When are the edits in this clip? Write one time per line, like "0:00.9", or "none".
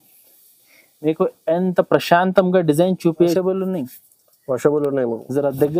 0:03.2

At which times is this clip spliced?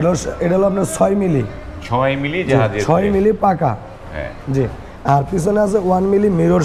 none

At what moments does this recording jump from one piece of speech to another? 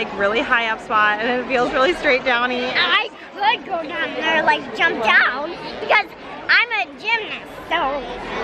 0:02.7

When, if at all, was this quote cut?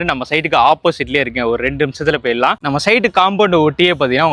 none

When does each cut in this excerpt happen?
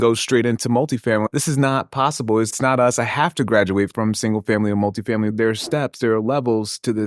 0:01.3
0:02.5
0:03.9
0:05.3

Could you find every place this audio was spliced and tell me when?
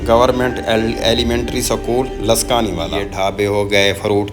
0:03.0

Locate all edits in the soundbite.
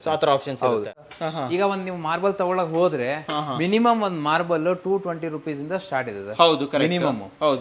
0:00.9

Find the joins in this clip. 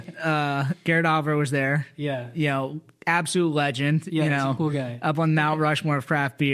none

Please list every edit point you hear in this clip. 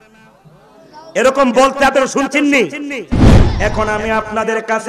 0:03.4

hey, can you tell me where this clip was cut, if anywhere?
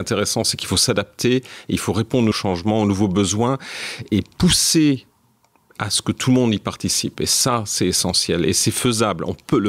0:02.3
0:04.1

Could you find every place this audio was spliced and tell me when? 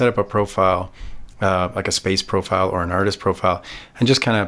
none

